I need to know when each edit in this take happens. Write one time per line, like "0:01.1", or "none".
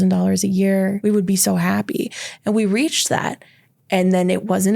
0:01.0